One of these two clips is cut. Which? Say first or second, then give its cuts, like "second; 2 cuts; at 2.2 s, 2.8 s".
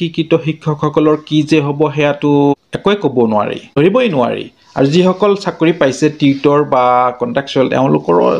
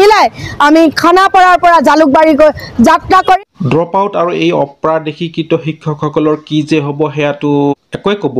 second; 1 cut; at 3.4 s